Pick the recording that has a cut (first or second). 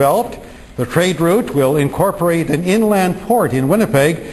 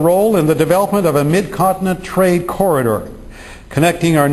second